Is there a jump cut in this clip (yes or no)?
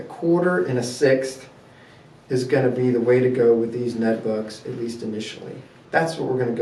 no